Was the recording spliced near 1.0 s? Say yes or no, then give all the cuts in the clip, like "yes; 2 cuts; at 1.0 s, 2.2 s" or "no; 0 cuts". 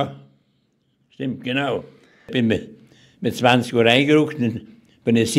no; 1 cut; at 2.2 s